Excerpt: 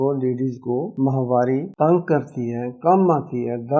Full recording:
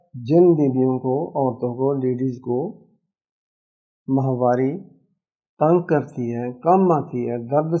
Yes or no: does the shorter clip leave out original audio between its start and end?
yes